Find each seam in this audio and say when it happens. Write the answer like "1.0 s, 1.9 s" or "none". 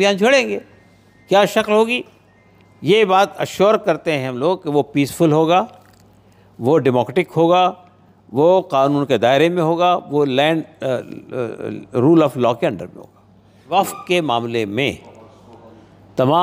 13.6 s